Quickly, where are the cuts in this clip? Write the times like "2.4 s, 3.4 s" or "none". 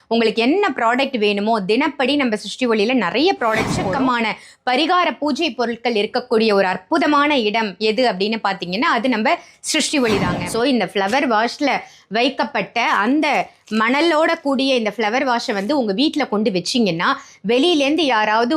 3.8 s, 10.4 s